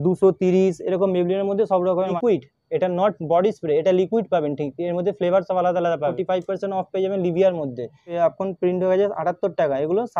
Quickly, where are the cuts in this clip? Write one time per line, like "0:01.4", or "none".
0:02.2
0:06.2
0:08.1